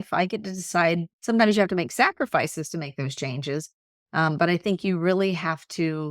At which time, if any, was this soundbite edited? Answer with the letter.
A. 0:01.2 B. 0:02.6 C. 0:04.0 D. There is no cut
D